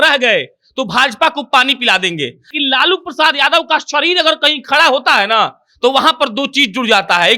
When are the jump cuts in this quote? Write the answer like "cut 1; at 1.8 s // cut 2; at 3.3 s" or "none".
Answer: cut 1; at 2.5 s